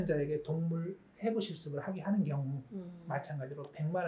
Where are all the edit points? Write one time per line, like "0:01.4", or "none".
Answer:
none